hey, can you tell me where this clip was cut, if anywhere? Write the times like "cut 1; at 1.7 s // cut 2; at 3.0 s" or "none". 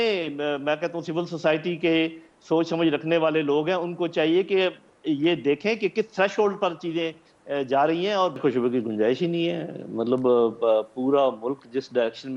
cut 1; at 8.4 s